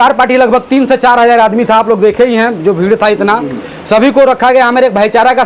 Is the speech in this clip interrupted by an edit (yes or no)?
no